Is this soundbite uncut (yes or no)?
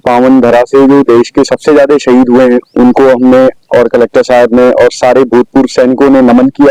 yes